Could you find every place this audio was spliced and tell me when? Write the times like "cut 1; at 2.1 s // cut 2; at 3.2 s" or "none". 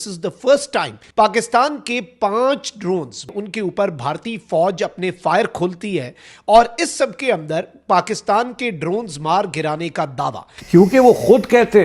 cut 1; at 1.0 s // cut 2; at 3.3 s // cut 3; at 10.5 s